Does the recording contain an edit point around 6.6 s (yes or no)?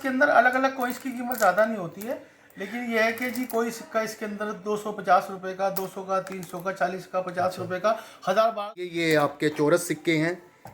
no